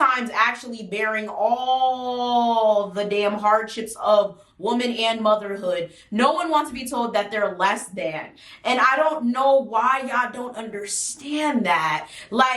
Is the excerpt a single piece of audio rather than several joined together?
yes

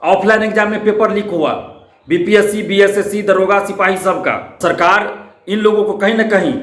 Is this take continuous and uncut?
no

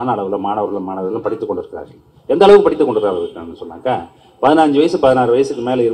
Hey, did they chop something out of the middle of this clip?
no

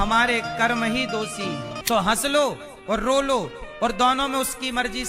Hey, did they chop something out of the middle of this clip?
yes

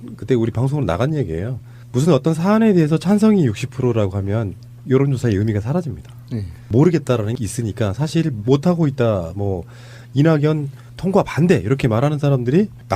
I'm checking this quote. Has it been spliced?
yes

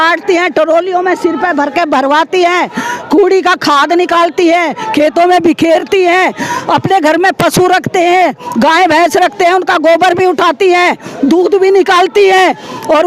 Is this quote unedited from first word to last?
yes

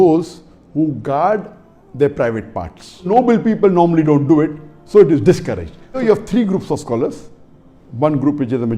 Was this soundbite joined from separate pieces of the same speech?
yes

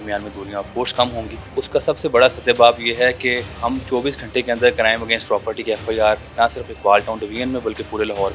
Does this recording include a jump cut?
yes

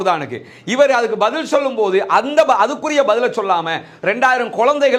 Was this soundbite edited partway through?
no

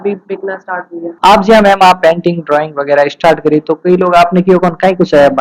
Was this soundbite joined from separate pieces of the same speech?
no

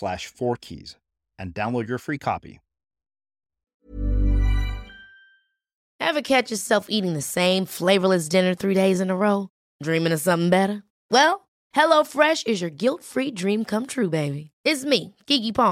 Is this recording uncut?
no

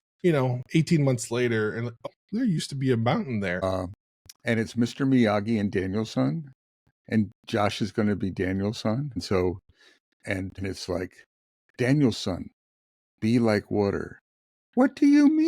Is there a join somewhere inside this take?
yes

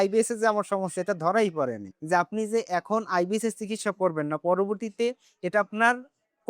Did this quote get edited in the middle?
yes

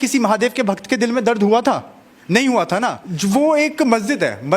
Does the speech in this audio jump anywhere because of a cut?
yes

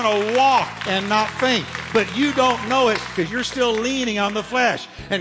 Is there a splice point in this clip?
yes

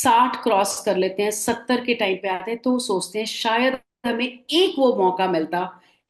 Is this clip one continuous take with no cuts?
yes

